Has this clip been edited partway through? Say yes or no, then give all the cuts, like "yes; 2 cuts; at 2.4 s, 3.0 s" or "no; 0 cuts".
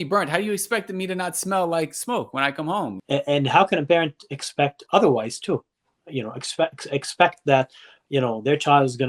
yes; 1 cut; at 3.0 s